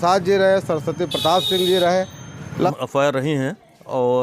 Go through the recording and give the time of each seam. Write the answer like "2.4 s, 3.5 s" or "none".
2.7 s